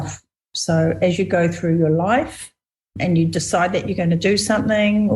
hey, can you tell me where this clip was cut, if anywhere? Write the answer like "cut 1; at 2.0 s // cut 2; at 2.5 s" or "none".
cut 1; at 3.0 s

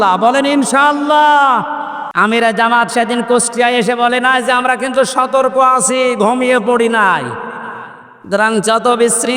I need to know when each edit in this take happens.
cut 1; at 2.0 s

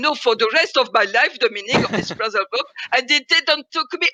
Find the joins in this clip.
none

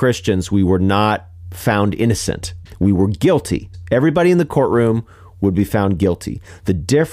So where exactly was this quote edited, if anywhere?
cut 1; at 2.5 s // cut 2; at 3.7 s

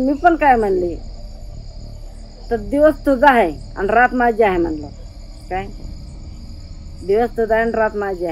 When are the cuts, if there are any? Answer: none

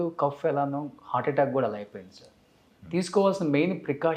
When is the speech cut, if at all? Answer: none

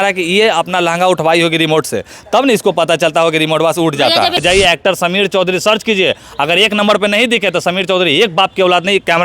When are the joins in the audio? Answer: cut 1; at 4.4 s

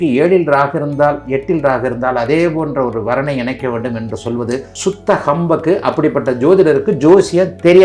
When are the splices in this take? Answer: none

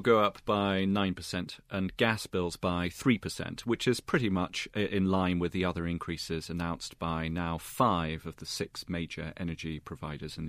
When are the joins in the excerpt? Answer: none

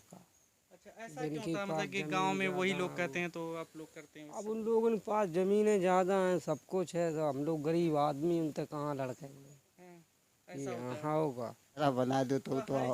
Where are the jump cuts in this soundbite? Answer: cut 1; at 11.8 s

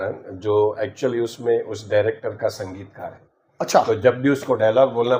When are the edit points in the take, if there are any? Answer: none

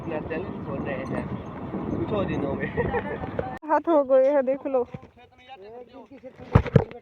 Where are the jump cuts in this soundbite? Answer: cut 1; at 3.6 s

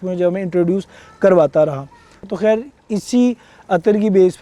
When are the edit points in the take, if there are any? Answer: none

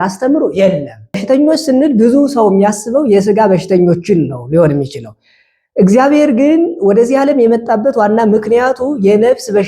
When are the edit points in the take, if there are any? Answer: cut 1; at 1.2 s

